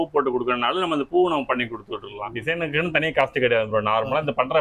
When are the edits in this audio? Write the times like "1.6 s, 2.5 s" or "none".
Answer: 2.3 s